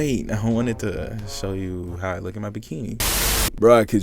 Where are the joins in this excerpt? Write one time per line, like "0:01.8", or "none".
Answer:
0:03.0